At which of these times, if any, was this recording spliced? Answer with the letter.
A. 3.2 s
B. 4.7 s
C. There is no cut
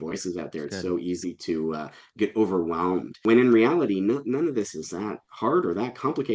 A